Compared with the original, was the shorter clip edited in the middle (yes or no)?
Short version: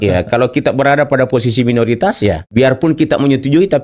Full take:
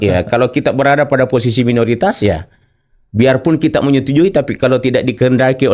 yes